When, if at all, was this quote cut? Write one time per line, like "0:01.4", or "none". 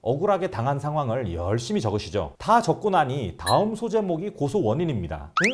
none